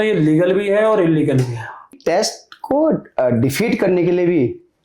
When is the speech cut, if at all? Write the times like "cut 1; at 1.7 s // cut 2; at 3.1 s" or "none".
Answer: cut 1; at 2.0 s